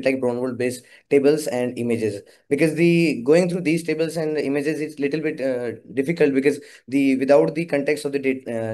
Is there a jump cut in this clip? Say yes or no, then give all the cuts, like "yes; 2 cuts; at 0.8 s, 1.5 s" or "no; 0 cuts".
no; 0 cuts